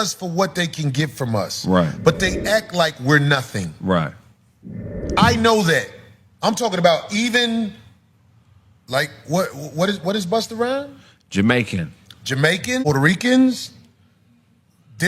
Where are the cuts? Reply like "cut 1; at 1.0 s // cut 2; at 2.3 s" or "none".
cut 1; at 12.8 s